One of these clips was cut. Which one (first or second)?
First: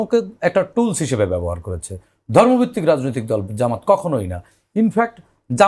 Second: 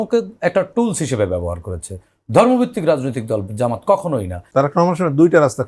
second